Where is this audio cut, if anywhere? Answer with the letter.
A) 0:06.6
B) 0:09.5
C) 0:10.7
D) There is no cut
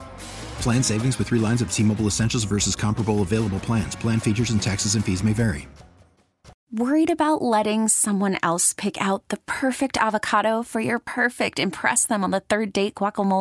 A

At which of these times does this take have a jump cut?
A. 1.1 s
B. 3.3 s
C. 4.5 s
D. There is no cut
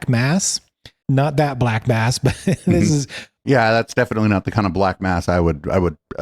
B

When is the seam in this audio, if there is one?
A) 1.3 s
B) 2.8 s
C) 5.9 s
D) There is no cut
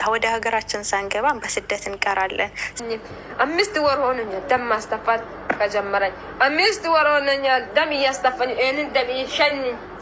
B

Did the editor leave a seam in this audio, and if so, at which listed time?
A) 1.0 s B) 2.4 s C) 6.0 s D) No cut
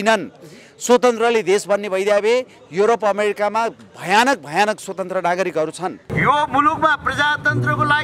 C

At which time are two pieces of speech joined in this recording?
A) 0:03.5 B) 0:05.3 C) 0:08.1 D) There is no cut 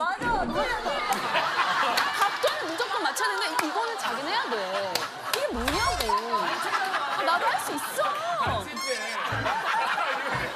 D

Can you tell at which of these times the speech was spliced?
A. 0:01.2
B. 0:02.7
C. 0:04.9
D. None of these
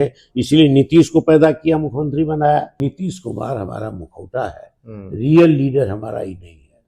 B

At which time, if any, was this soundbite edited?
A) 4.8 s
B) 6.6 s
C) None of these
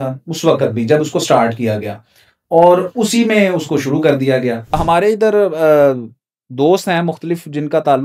A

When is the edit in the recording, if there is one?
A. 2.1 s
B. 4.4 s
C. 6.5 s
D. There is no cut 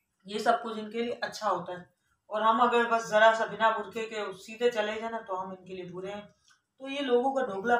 D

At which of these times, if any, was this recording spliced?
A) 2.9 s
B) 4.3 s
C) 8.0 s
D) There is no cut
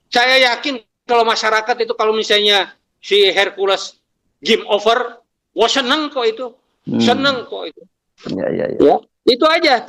D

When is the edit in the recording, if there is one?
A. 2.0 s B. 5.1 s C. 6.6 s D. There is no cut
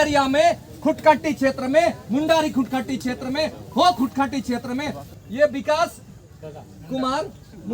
B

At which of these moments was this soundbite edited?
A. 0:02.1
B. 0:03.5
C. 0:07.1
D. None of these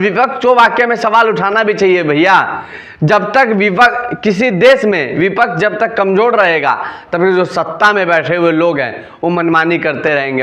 D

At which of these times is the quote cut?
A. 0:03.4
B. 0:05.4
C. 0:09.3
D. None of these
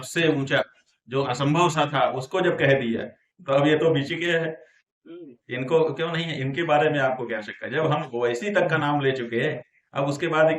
D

